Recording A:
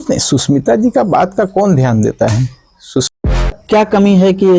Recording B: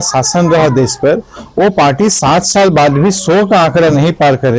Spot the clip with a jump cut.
A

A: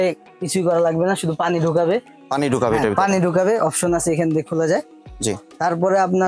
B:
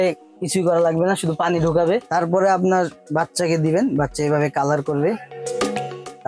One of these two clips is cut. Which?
B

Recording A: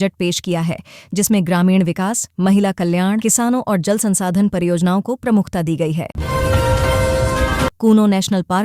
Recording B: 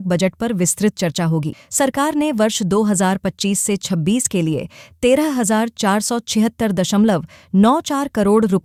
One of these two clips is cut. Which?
A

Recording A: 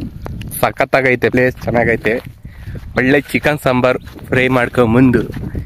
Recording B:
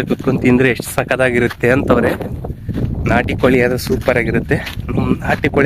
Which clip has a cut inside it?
A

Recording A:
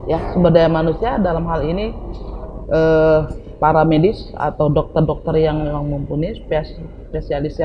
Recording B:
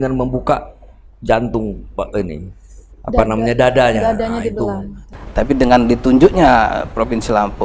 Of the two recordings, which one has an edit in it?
B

